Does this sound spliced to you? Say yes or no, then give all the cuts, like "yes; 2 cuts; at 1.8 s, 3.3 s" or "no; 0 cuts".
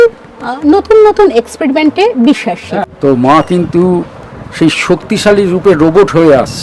yes; 1 cut; at 2.9 s